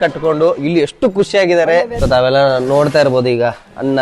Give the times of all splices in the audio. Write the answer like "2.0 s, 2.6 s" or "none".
1.9 s